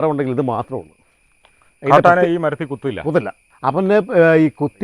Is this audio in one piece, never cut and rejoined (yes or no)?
no